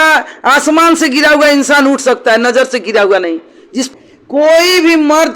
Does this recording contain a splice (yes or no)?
yes